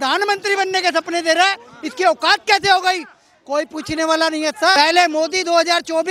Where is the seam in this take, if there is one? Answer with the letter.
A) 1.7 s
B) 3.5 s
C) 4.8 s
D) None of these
C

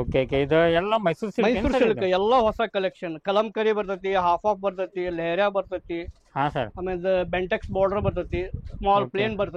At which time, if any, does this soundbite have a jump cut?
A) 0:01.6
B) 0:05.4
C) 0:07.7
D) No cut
D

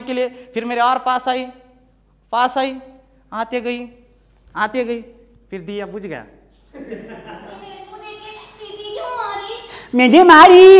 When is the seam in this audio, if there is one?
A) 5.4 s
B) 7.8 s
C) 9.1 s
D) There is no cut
B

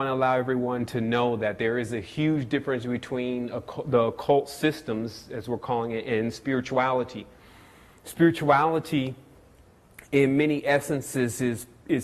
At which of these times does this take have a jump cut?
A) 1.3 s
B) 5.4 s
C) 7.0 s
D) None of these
D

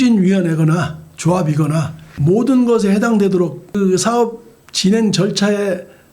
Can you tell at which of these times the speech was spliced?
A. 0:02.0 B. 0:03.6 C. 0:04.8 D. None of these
A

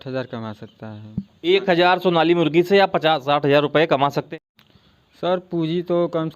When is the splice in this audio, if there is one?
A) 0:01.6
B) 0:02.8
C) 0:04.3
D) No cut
C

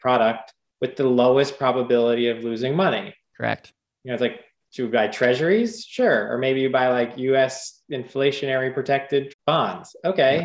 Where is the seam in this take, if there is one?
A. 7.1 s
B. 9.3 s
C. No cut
B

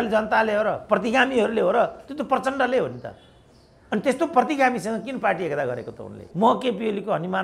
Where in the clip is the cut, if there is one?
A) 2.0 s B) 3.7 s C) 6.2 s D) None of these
C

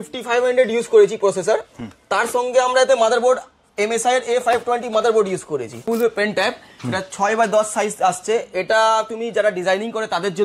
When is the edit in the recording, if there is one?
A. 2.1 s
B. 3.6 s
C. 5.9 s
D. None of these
C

